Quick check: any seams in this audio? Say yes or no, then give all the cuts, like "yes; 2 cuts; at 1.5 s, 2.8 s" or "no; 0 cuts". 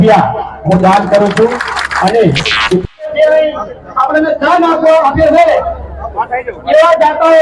yes; 1 cut; at 2.8 s